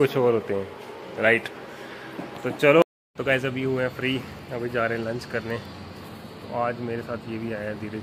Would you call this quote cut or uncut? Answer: cut